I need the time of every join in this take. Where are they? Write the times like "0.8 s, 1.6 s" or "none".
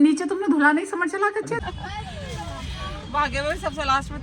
1.6 s